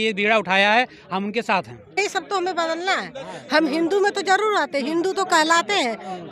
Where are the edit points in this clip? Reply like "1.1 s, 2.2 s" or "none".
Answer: 2.0 s